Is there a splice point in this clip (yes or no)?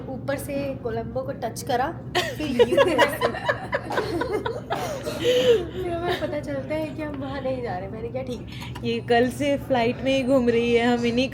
yes